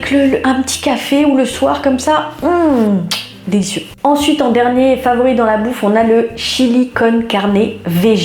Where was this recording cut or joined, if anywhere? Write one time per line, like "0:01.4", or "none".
none